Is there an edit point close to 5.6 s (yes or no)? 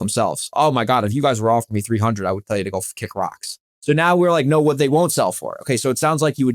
no